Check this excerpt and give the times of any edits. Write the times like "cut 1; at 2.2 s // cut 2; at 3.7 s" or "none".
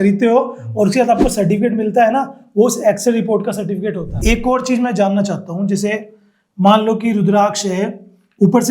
cut 1; at 4.1 s